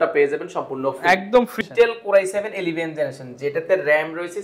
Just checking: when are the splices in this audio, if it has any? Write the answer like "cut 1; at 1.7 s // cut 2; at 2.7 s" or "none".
cut 1; at 1.5 s